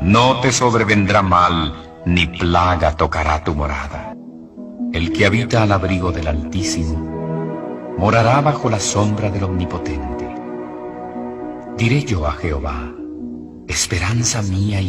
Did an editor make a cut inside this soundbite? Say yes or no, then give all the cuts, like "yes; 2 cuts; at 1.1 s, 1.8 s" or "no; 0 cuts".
yes; 1 cut; at 4.1 s